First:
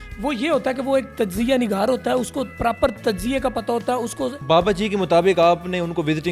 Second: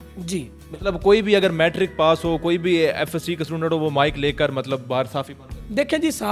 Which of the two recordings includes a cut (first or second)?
first